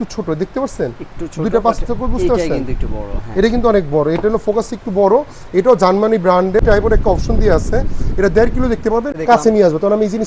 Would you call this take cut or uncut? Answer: cut